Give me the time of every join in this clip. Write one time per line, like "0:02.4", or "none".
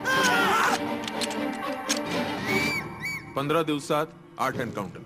0:02.4